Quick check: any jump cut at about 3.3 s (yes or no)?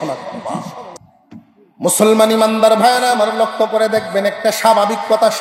no